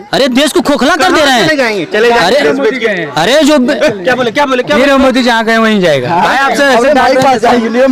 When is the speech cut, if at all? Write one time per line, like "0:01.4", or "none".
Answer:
none